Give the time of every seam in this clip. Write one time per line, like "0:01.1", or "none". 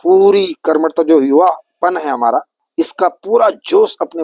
0:02.6